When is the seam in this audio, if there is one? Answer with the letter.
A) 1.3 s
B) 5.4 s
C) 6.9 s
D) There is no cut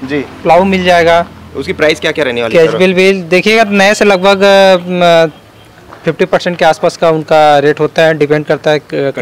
D